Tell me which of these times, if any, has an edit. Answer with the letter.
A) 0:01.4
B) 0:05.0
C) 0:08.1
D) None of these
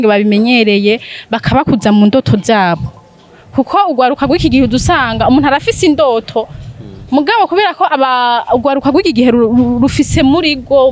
D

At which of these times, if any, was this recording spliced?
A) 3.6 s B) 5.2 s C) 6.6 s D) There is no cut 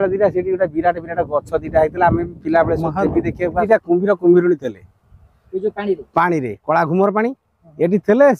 A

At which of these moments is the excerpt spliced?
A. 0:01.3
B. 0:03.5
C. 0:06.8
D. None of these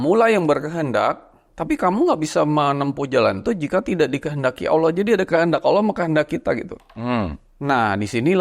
D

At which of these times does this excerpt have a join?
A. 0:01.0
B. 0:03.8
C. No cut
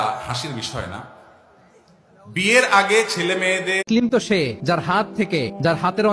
B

